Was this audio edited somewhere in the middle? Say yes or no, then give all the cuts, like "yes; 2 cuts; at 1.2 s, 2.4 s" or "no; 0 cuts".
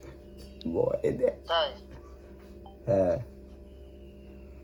no; 0 cuts